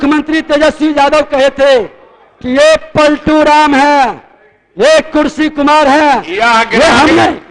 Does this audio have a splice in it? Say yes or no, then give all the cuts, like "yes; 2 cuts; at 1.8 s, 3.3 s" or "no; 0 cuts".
no; 0 cuts